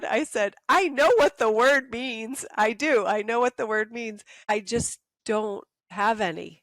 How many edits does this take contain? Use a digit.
2